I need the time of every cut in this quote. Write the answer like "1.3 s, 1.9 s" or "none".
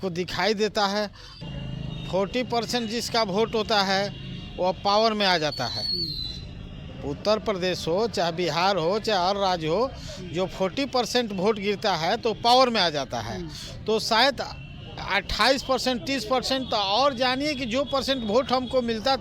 1.5 s